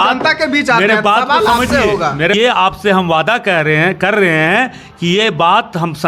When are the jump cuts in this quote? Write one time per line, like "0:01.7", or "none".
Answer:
0:02.3